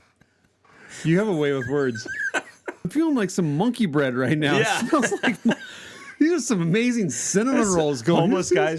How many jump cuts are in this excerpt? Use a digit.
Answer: 1